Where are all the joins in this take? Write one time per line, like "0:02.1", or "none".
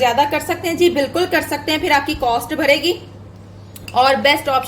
none